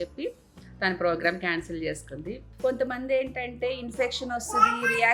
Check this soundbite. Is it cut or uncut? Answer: cut